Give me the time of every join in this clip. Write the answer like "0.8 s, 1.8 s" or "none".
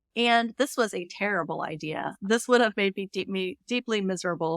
2.1 s